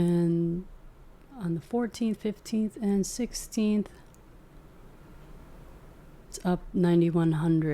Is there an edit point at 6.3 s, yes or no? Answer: yes